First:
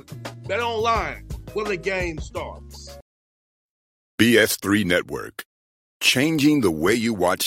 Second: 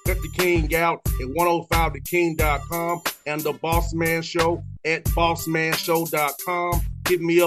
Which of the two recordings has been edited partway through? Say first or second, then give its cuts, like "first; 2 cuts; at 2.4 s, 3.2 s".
first; 1 cut; at 2.9 s